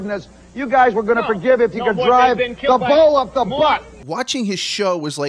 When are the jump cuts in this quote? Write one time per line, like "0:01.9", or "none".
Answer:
0:03.9